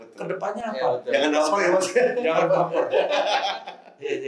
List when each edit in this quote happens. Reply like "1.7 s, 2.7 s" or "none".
none